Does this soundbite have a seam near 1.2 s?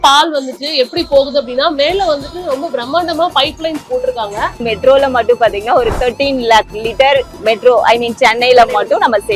no; 2 cuts; at 4.7 s, 7.3 s

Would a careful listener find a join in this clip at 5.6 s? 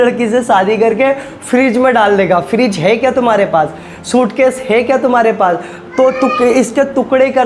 no; 0 cuts

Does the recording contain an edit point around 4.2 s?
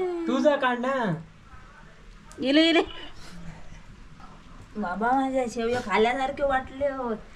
yes; 1 cut; at 4.2 s

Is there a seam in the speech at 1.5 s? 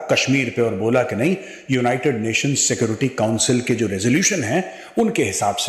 no; 0 cuts

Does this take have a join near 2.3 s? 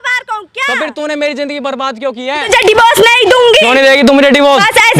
yes; 1 cut; at 2.3 s

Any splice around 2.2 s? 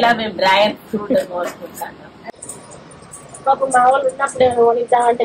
yes; 1 cut; at 2.2 s

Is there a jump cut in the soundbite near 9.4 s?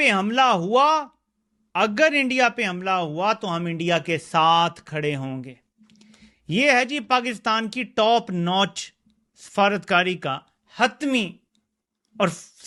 no; 0 cuts

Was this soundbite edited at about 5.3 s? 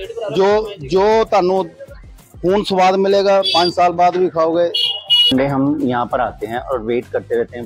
yes; 1 cut; at 5.3 s

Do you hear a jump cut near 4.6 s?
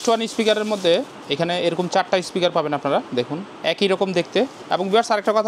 yes; 2 cuts; at 3.5 s, 4.6 s

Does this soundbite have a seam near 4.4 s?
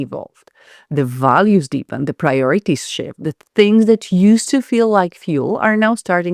no; 0 cuts

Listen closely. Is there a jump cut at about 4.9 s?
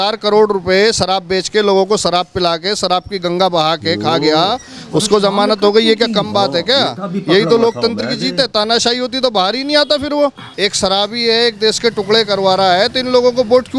no; 1 cut; at 10.6 s

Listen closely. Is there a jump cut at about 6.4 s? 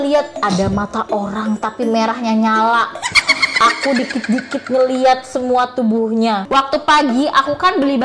yes; 1 cut; at 6.4 s

